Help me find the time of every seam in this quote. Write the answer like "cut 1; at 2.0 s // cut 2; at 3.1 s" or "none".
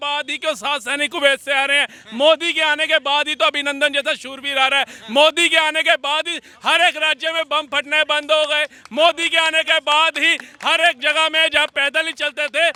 none